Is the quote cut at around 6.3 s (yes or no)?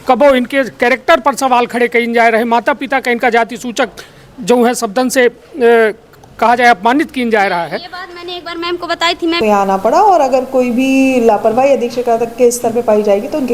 no